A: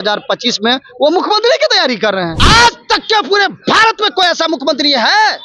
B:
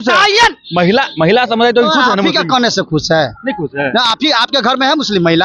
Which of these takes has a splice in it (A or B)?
A